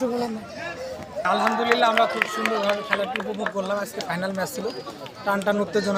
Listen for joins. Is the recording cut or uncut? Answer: uncut